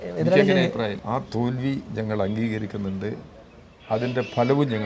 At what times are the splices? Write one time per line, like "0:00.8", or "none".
0:01.0

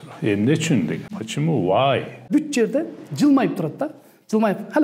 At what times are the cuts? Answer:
0:01.2
0:02.3

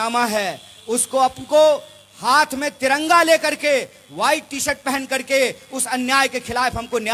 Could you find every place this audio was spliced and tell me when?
none

